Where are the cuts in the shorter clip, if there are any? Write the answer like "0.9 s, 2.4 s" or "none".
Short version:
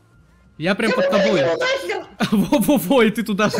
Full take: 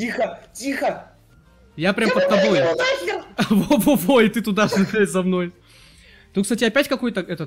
none